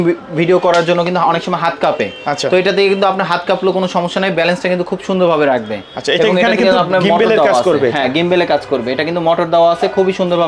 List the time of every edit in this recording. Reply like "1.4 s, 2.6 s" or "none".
none